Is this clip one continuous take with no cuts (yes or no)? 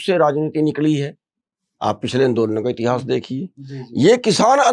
yes